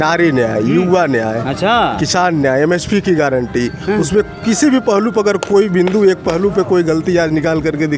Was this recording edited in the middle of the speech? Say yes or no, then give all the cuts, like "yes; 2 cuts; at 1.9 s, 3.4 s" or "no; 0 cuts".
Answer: no; 0 cuts